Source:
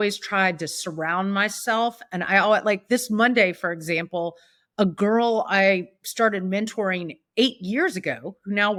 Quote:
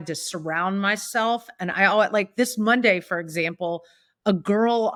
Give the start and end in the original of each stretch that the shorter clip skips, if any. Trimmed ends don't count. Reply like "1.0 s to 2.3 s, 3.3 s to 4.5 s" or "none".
none